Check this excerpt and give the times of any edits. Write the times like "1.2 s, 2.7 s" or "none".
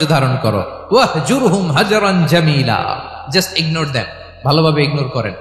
none